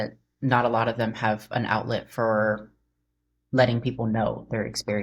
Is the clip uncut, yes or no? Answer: yes